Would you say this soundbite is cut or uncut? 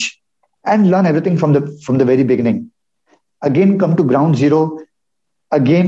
uncut